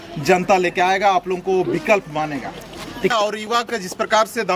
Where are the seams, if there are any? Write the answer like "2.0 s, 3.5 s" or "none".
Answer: 3.1 s